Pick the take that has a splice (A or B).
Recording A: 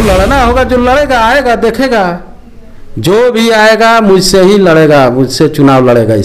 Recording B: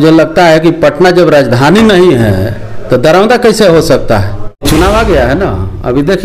B